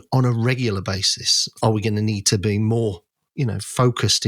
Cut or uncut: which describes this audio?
cut